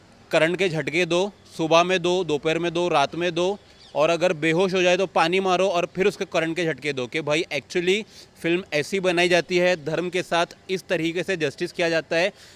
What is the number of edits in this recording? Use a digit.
0